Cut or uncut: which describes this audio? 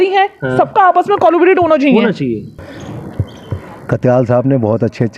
cut